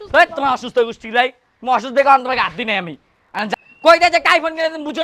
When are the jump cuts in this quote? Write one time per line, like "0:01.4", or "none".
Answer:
0:03.5